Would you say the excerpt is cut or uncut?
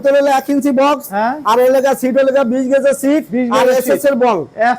uncut